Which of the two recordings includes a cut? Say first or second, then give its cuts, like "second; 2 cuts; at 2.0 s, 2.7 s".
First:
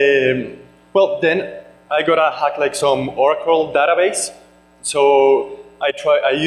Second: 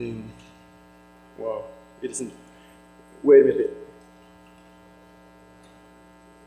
first; 1 cut; at 5.5 s